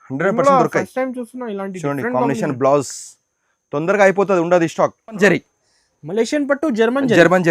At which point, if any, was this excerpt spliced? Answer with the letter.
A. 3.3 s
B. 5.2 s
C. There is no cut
B